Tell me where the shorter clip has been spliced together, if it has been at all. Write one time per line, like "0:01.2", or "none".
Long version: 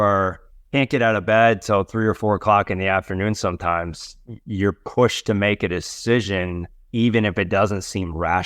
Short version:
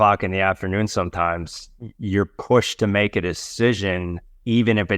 none